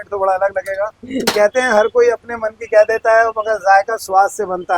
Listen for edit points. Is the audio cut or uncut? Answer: uncut